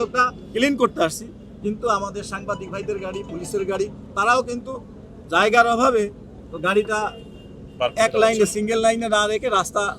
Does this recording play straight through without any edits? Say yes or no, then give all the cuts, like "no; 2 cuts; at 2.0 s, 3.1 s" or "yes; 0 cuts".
yes; 0 cuts